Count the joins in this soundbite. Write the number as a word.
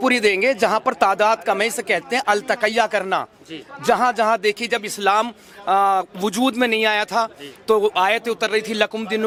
zero